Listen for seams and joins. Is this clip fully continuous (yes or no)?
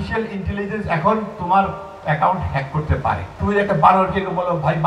no